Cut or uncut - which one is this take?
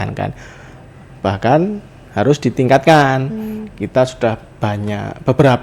uncut